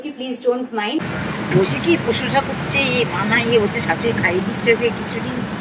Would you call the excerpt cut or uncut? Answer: cut